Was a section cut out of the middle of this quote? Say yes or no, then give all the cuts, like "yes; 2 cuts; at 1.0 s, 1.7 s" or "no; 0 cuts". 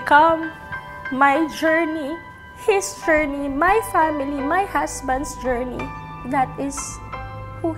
no; 0 cuts